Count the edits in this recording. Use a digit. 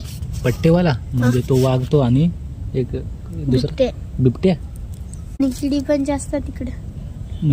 1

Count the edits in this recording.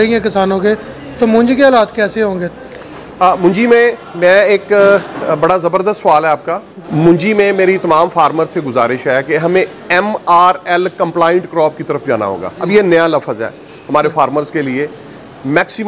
2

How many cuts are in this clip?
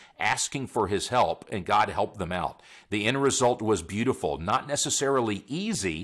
0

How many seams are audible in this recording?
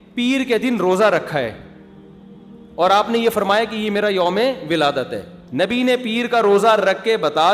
1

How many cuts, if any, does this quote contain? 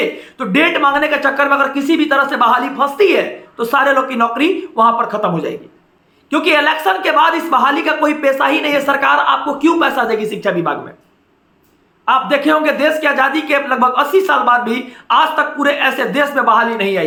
0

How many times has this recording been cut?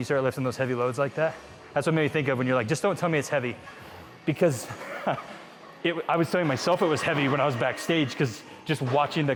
0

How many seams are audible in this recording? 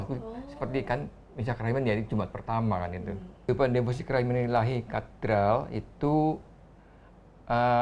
1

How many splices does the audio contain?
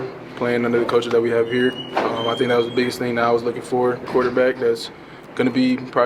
1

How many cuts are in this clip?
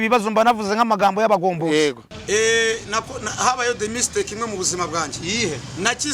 1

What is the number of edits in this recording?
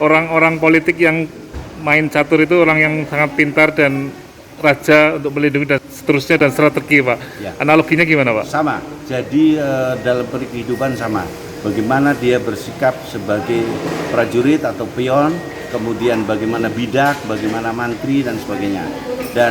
1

